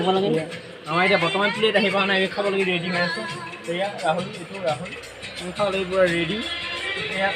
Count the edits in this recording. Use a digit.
0